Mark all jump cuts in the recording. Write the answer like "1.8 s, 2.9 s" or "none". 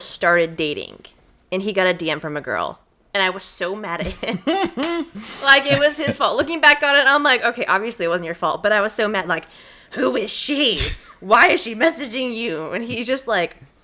none